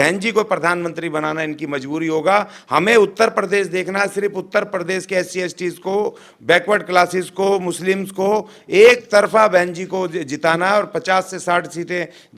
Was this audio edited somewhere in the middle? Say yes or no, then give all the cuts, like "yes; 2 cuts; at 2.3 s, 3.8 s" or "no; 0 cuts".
no; 0 cuts